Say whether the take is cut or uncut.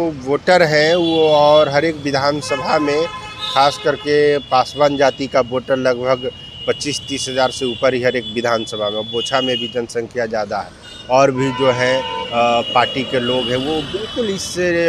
uncut